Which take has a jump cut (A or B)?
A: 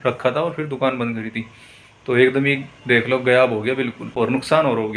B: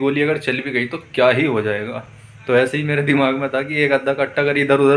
A